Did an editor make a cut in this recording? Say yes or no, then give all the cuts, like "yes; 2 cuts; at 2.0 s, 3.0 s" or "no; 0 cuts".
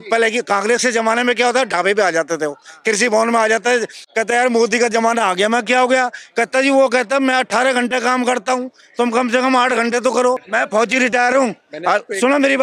yes; 2 cuts; at 4.0 s, 10.5 s